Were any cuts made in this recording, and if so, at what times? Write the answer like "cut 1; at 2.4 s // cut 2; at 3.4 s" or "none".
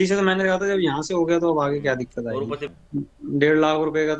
cut 1; at 2.7 s